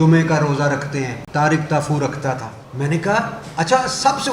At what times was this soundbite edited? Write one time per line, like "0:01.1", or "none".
0:01.2
0:02.6